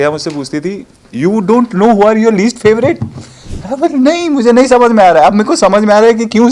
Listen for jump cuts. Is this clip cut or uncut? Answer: uncut